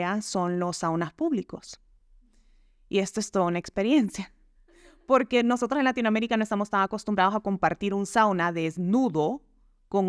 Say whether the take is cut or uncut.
uncut